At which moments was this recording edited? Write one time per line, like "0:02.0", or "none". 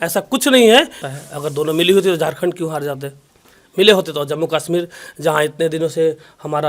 0:01.0